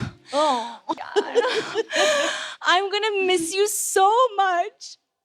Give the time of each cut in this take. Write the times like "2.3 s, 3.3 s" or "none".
1.0 s